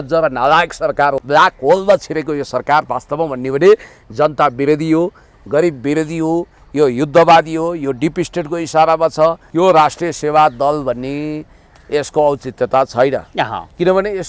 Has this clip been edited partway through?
yes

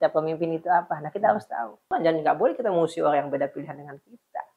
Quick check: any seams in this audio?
yes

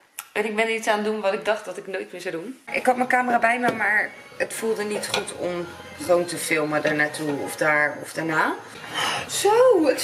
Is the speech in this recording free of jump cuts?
no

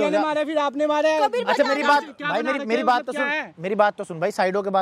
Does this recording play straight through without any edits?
yes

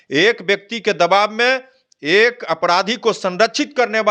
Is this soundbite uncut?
yes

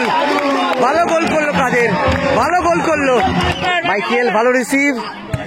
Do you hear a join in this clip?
yes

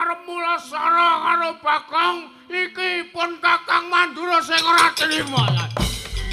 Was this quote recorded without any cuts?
yes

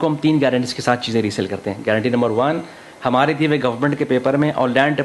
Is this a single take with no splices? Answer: yes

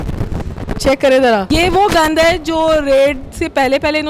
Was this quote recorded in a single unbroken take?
no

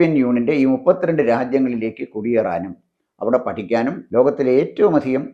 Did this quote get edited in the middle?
yes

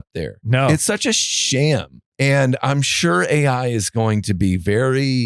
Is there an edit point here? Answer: yes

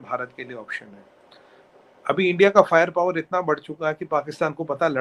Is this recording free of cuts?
yes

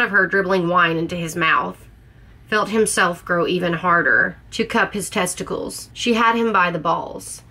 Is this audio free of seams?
no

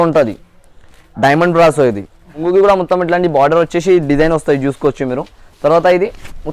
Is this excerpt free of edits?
no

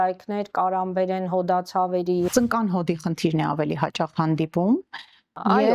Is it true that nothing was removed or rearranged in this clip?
no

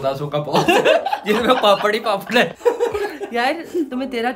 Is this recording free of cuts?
yes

